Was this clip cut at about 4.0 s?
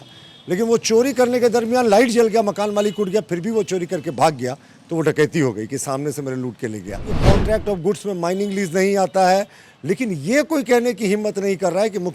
no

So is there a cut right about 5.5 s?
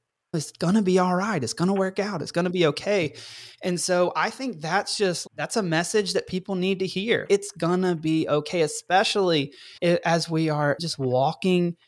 no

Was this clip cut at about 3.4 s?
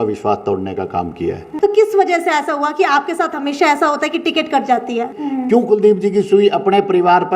no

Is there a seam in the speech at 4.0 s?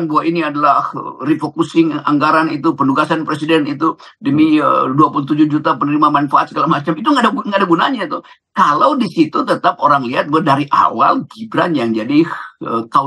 no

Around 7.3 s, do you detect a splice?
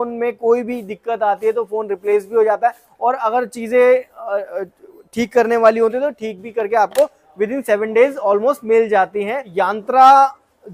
no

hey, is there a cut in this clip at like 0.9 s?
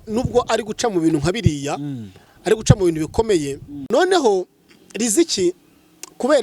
no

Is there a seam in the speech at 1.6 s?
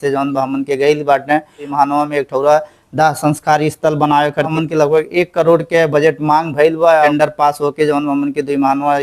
yes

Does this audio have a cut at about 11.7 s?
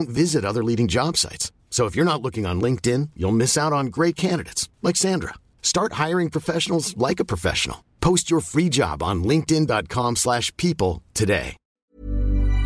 yes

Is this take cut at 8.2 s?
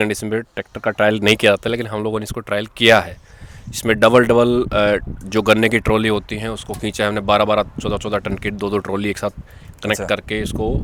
no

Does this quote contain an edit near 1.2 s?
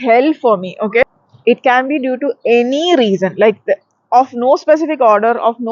yes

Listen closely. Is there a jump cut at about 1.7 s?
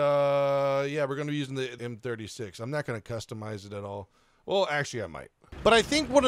yes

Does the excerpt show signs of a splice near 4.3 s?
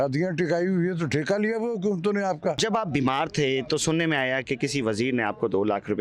no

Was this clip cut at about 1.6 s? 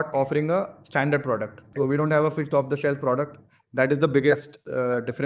yes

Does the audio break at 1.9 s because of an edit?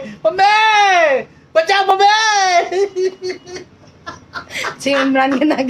no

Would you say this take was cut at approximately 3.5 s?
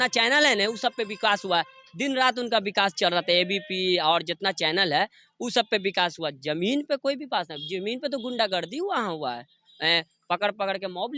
no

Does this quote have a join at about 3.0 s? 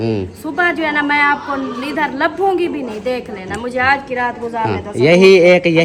no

